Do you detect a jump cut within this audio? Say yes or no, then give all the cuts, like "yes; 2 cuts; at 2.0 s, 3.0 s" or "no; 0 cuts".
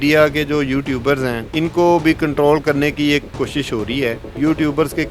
yes; 2 cuts; at 1.4 s, 4.3 s